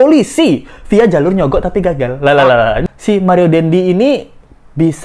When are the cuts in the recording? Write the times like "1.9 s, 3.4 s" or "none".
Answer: 2.8 s